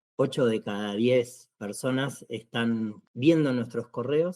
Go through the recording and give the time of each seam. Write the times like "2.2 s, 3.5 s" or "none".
3.0 s